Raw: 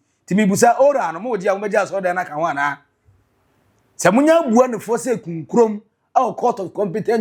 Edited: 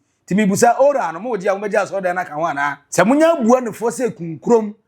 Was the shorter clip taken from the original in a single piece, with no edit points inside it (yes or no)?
no